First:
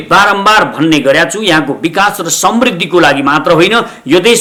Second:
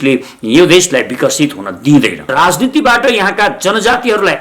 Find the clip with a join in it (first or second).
second